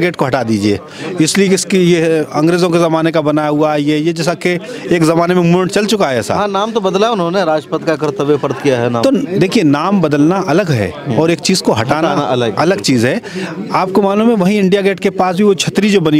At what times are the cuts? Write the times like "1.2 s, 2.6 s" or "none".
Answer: none